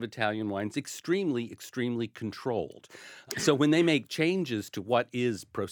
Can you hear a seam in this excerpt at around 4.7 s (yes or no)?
no